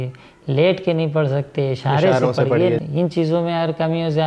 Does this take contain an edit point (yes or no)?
yes